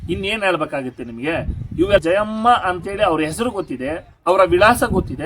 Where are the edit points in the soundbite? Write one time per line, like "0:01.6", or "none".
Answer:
0:02.0